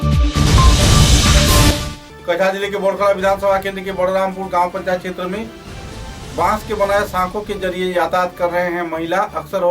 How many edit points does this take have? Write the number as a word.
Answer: one